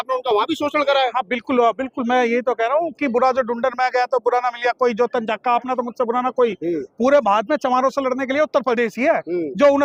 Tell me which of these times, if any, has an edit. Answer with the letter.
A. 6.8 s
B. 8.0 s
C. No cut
C